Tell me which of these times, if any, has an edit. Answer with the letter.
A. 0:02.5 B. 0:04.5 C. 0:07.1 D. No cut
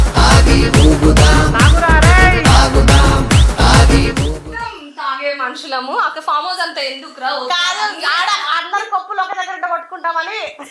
D